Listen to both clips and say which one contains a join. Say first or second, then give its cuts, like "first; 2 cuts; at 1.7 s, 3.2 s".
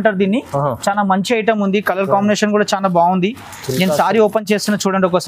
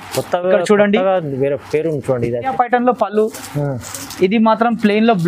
second; 1 cut; at 2.5 s